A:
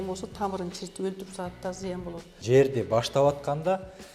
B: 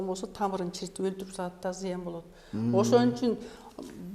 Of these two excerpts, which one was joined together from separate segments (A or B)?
A